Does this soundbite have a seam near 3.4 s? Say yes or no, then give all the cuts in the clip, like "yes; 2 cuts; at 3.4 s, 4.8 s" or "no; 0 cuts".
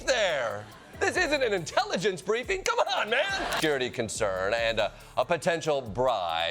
yes; 1 cut; at 3.4 s